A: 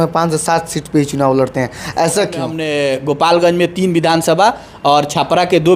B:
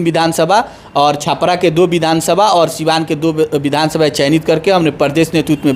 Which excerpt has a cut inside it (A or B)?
A